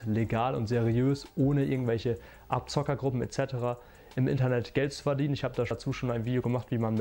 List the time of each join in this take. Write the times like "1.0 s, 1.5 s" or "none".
5.7 s